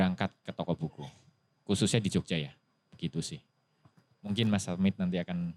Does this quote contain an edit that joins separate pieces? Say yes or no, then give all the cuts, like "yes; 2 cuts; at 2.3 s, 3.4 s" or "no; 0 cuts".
no; 0 cuts